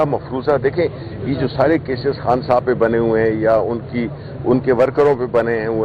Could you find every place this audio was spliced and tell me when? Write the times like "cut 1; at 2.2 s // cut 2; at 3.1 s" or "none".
none